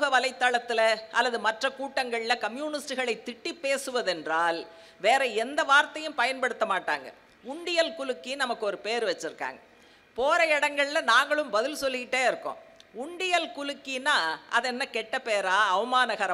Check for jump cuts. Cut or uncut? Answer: uncut